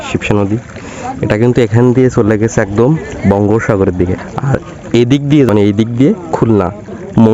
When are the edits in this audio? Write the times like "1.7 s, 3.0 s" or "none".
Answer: 4.3 s, 5.5 s